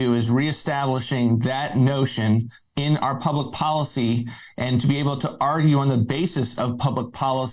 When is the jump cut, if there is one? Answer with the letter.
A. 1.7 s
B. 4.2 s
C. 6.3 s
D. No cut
D